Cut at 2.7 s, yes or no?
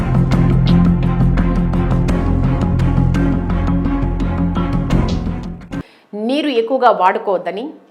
yes